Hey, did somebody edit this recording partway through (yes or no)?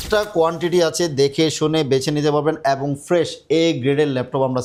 no